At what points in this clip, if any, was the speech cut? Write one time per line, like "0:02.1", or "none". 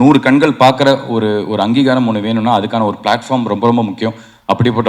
none